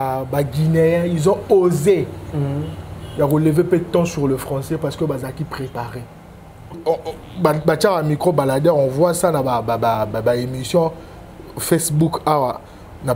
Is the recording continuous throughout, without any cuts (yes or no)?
no